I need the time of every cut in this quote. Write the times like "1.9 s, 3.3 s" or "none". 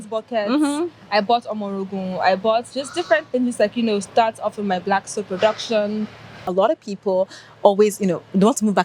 6.4 s

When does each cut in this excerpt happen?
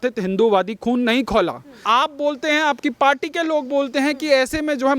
1.7 s

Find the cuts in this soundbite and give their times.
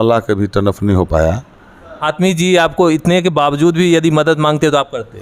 2.0 s

